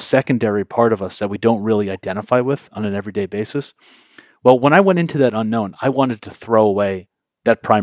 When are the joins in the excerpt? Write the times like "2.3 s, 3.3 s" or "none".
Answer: none

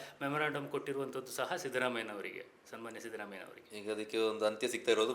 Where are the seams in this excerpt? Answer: none

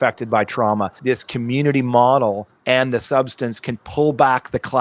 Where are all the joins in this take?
1.0 s

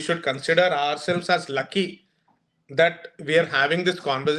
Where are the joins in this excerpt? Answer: none

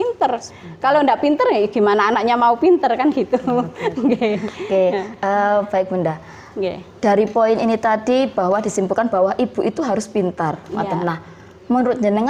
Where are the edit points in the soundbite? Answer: none

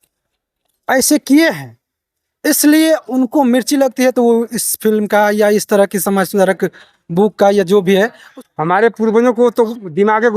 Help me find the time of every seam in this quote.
8.3 s

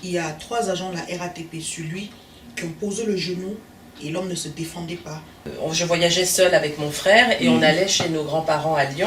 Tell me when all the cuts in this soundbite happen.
5.5 s

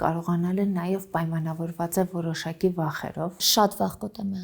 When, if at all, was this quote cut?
3.4 s

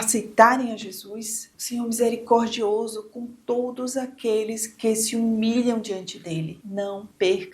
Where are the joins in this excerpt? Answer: 1.4 s, 6.5 s

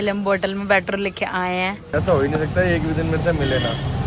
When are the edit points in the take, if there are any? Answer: 1.8 s

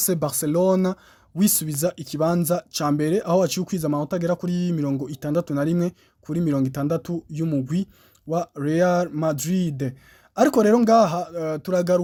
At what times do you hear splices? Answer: none

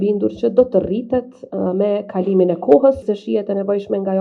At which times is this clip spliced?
3.0 s

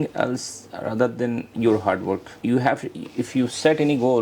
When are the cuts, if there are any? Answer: 2.4 s

